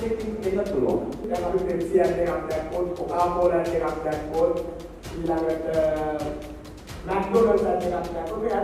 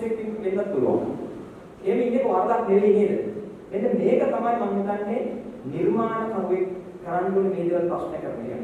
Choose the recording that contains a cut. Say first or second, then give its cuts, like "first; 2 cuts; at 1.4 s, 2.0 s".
first; 1 cut; at 1.3 s